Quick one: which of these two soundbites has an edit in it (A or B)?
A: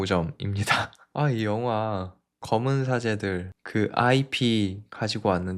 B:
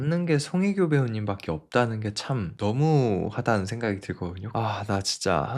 B